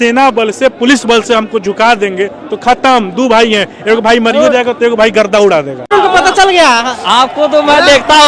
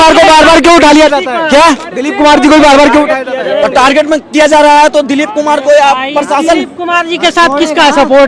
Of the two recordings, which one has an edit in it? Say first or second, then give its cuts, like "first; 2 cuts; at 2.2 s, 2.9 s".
first; 1 cut; at 5.9 s